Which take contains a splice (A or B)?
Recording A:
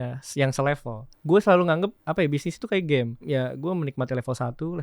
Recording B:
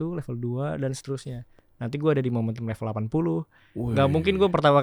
A